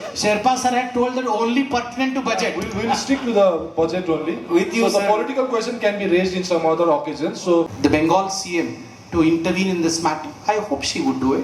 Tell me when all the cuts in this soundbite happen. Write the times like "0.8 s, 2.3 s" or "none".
7.7 s